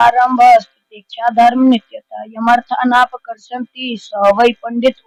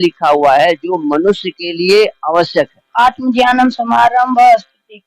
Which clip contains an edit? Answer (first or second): second